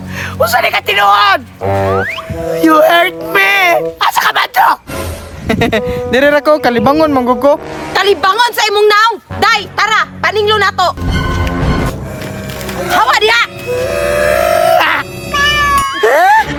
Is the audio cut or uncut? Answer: uncut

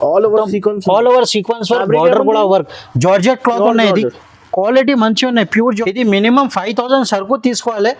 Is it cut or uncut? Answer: cut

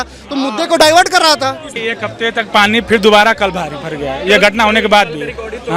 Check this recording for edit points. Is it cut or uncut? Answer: cut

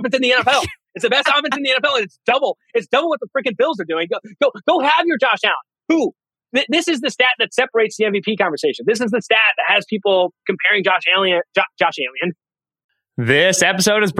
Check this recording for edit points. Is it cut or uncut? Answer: cut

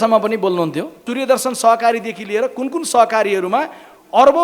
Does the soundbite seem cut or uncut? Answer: cut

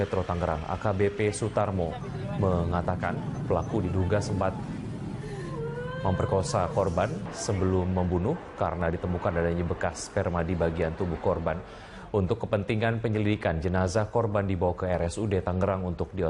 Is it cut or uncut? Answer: uncut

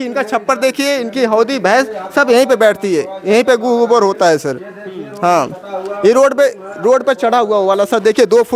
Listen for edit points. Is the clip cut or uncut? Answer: uncut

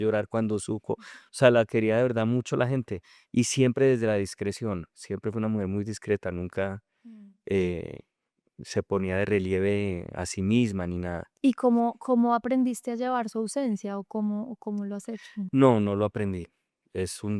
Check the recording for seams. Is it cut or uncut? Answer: uncut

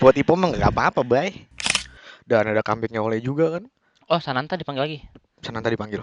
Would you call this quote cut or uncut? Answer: cut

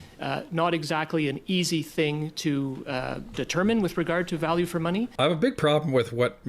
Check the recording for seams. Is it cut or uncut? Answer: cut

